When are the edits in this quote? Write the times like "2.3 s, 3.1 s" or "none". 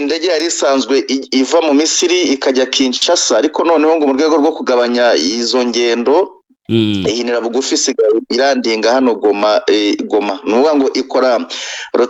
none